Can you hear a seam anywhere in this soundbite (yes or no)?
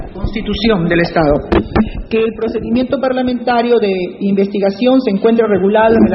yes